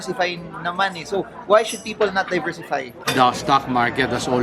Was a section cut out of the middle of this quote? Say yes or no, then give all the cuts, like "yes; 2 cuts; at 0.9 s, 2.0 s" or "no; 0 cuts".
yes; 1 cut; at 3.1 s